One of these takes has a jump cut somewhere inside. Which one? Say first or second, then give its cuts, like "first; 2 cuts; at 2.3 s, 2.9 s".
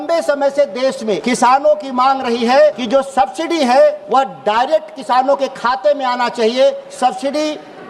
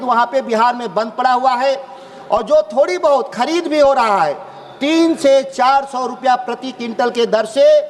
first; 4 cuts; at 1.2 s, 2.8 s, 4.0 s, 6.9 s